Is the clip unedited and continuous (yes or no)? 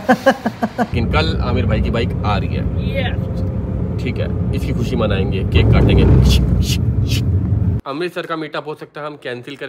no